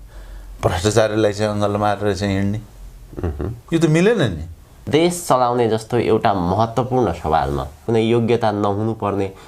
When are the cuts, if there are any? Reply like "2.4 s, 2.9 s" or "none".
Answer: 4.8 s, 7.8 s